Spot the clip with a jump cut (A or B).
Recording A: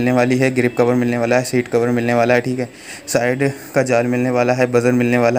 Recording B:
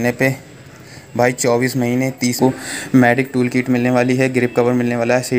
B